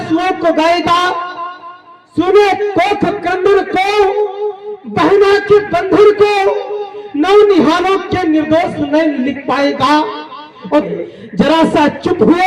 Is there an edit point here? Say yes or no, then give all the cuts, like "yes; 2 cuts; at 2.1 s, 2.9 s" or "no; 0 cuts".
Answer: yes; 1 cut; at 10.9 s